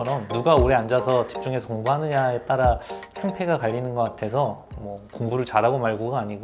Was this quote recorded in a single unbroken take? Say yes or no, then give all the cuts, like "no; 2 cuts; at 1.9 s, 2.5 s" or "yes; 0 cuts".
yes; 0 cuts